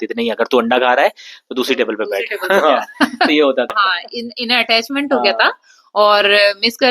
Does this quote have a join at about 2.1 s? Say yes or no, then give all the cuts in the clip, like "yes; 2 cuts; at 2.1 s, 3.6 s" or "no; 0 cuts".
no; 1 cut; at 3.7 s